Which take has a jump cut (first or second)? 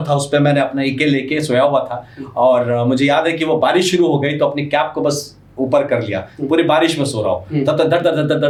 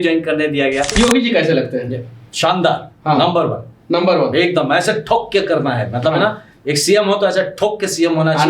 second